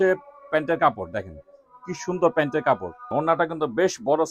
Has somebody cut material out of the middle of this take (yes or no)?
yes